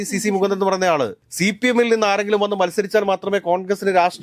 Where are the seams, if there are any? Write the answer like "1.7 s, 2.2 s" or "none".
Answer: 1.2 s